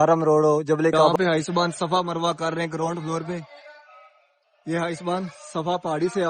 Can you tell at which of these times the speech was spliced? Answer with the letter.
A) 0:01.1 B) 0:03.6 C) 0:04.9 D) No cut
A